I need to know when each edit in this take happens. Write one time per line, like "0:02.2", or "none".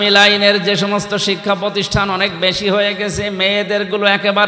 none